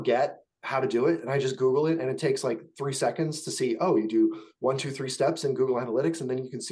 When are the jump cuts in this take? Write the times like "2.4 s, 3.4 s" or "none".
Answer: none